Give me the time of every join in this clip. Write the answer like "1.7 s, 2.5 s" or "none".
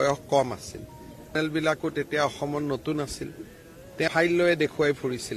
1.3 s, 4.1 s